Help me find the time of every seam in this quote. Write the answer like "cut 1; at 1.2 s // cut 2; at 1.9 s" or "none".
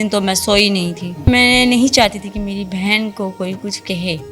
cut 1; at 1.3 s